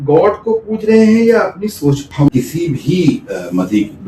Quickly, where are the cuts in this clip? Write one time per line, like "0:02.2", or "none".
0:02.3